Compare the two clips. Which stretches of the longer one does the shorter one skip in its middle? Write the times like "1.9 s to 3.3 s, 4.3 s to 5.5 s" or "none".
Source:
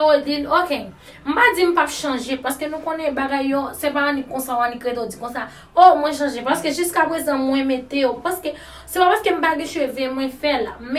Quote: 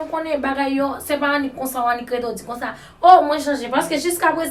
none